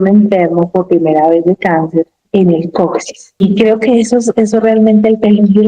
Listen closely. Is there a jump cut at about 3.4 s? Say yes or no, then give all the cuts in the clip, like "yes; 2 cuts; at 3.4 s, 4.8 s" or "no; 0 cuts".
yes; 2 cuts; at 2.2 s, 3.4 s